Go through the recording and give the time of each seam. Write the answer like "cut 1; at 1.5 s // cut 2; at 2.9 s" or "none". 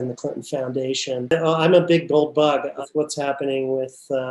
cut 1; at 1.3 s // cut 2; at 2.8 s